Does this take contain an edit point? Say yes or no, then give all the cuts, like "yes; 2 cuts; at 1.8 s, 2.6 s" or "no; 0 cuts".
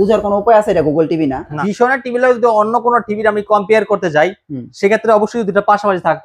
yes; 1 cut; at 1.5 s